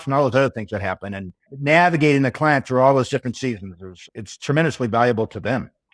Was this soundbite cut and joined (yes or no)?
no